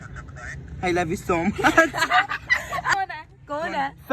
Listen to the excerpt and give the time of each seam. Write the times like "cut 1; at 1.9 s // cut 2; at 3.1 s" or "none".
cut 1; at 2.9 s